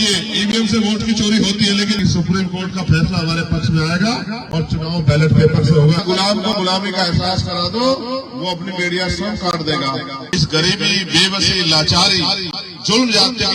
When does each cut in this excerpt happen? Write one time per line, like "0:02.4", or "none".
0:02.0
0:06.0
0:10.2